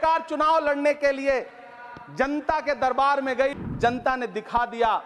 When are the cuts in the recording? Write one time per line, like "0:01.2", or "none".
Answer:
0:03.5